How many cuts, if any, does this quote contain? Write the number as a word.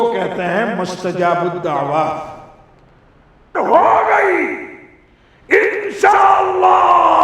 one